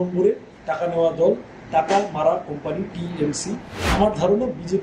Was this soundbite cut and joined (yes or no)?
yes